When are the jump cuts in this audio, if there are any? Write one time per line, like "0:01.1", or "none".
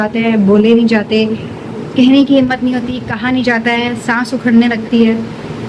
none

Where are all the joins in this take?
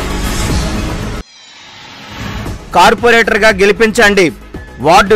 0:00.8
0:02.2

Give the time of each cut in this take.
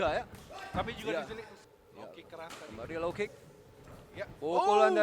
0:01.5

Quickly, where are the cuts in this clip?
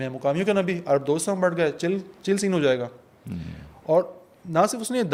none

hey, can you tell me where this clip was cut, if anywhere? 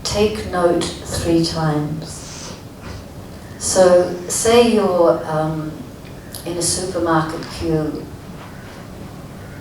none

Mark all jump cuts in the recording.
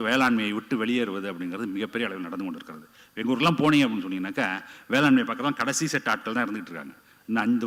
none

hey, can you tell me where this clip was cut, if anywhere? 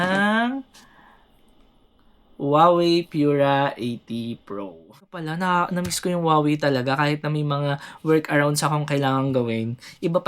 0:05.0

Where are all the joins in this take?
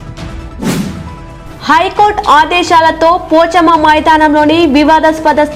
0:01.2

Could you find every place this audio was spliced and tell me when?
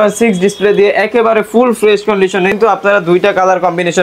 0:02.6

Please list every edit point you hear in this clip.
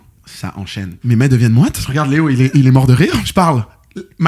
0:01.0
0:01.8
0:03.3

